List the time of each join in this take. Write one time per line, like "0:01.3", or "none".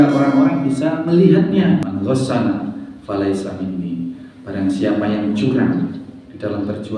0:01.0
0:01.9